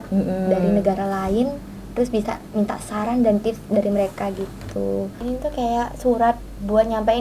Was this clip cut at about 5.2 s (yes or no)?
yes